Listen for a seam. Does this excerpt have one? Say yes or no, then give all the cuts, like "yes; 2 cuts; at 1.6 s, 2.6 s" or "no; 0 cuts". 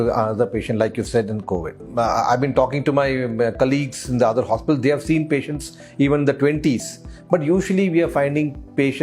no; 0 cuts